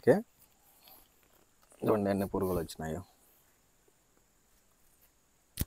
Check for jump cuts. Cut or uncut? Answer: uncut